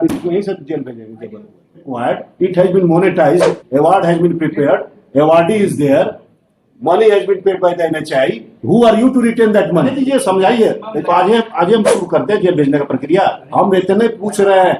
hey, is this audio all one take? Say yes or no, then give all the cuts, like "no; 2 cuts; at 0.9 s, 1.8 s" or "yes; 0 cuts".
no; 3 cuts; at 2.0 s, 9.9 s, 13.4 s